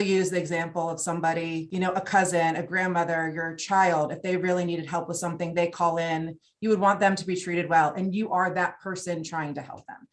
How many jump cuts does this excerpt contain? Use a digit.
1